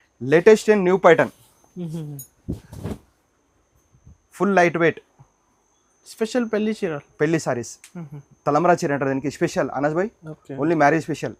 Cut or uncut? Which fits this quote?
uncut